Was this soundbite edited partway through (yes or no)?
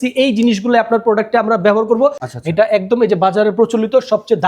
yes